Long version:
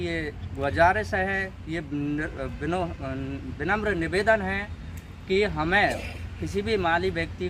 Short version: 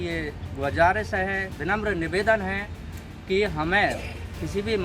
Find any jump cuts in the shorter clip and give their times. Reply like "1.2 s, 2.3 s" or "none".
1.5 s